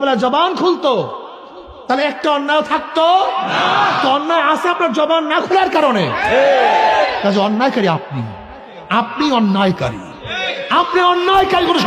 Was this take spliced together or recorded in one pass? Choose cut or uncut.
uncut